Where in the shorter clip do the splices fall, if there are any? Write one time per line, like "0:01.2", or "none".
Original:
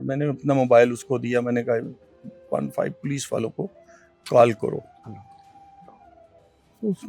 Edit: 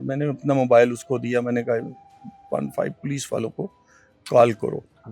none